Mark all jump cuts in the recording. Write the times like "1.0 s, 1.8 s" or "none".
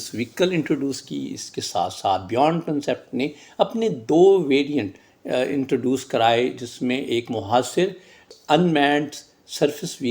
8.4 s